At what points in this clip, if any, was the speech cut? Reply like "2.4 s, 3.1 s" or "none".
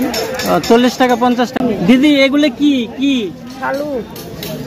1.6 s